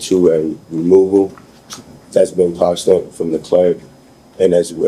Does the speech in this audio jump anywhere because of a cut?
no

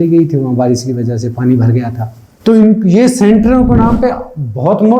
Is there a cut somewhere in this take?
no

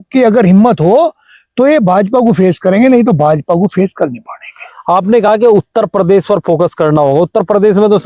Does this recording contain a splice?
no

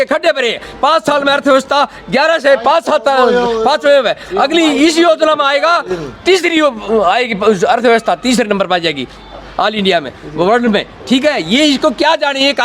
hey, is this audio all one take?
yes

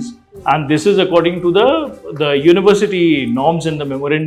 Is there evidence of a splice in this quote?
no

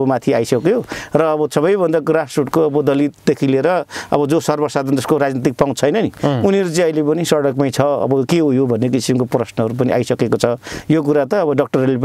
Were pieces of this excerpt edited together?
no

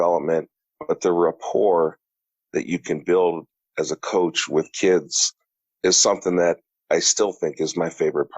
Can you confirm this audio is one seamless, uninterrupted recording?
no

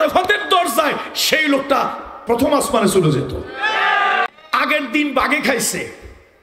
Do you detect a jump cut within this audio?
yes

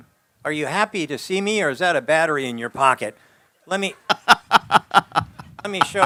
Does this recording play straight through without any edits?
yes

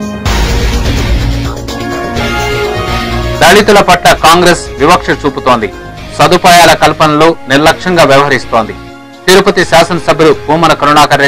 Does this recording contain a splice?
yes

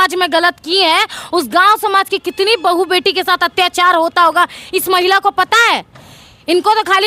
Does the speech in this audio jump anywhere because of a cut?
no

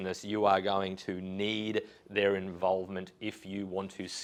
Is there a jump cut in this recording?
no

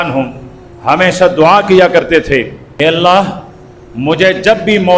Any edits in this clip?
yes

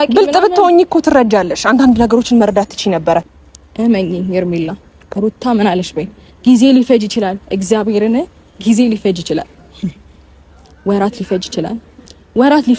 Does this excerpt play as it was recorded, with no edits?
no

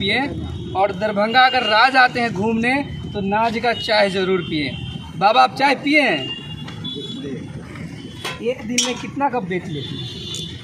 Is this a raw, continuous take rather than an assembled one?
no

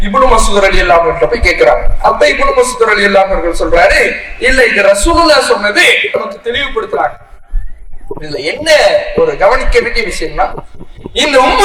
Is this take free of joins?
yes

